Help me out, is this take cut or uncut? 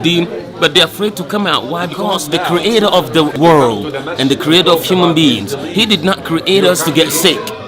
cut